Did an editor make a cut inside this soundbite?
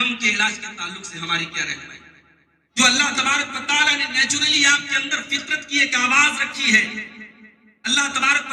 yes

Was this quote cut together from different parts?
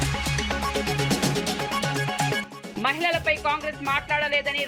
yes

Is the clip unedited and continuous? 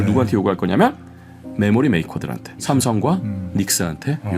no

